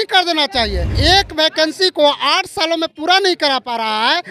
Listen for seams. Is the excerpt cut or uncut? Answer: cut